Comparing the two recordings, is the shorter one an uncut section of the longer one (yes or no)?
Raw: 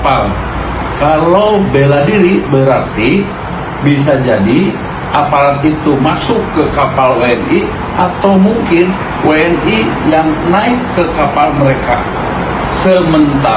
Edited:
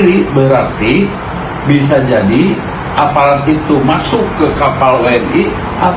yes